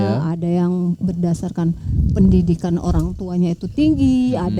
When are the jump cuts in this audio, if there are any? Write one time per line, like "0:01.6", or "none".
none